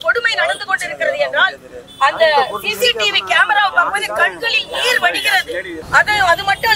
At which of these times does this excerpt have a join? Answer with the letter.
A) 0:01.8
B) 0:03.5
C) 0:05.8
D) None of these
C